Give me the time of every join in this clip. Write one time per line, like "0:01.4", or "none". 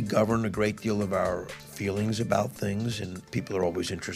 0:01.6
0:03.1